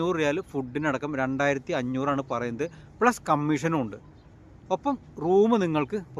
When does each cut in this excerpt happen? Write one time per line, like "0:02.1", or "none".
none